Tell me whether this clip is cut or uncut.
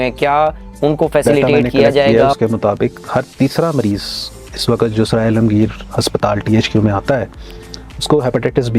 cut